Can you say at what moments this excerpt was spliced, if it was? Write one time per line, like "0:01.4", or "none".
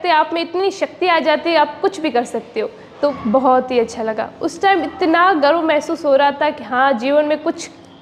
0:03.1

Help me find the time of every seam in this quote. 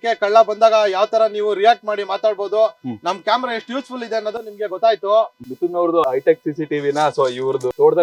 none

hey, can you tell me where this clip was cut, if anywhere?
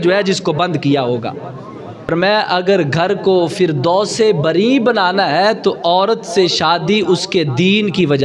0:02.0

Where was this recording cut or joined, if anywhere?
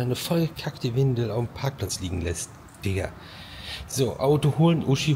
none

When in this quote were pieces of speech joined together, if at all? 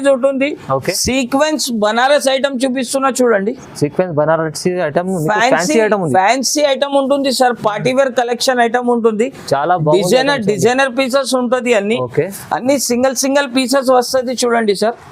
0:01.0

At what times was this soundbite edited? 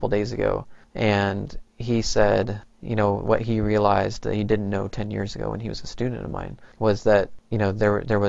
none

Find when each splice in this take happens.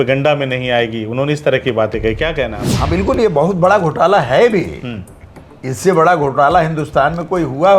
0:02.7

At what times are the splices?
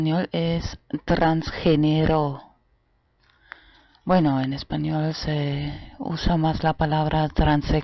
0:02.7

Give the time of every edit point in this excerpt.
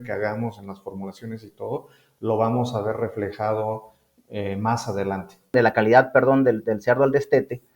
0:05.5

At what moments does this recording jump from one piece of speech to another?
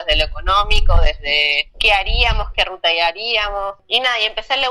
0:03.8

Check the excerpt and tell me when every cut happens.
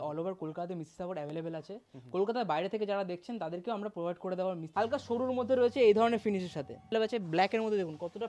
0:04.7
0:06.9

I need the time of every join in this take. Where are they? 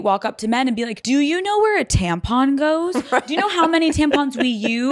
0:01.0

